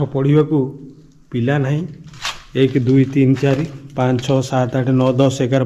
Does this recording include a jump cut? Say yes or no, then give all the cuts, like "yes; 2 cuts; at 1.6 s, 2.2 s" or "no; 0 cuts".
no; 0 cuts